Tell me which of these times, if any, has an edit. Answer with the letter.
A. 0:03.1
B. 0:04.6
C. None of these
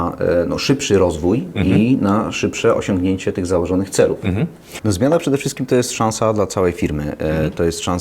B